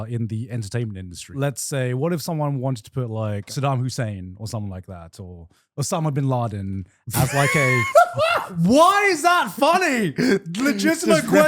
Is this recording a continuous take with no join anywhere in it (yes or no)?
no